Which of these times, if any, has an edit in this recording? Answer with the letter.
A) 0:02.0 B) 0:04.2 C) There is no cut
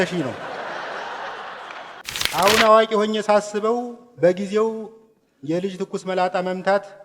A